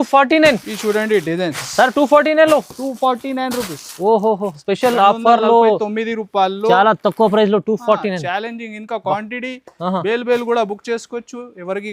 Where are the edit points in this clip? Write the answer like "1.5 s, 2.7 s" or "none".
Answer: none